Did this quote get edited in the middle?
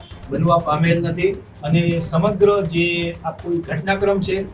yes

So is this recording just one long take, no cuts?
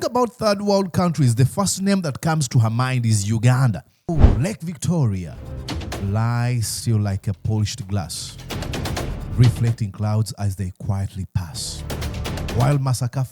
no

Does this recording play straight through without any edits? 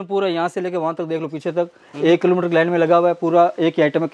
yes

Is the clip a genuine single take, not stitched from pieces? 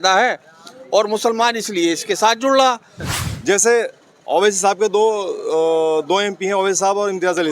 no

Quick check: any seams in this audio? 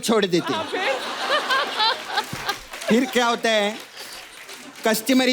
no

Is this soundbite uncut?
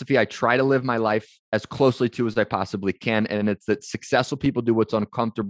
no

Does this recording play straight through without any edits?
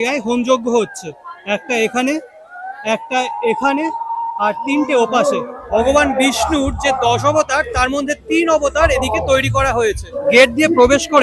no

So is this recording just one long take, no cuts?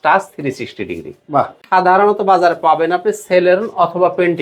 no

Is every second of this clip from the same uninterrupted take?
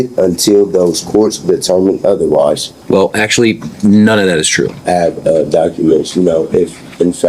no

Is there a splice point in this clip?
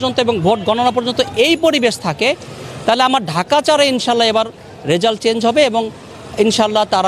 no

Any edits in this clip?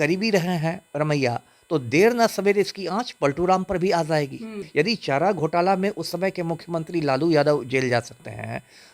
yes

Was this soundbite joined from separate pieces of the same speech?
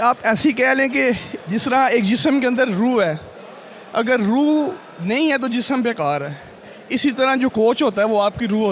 no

